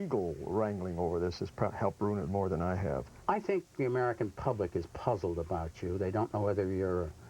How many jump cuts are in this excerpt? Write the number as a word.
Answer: one